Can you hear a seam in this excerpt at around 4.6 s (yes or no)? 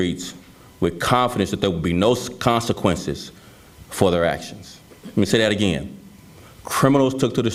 no